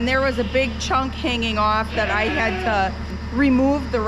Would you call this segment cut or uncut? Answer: cut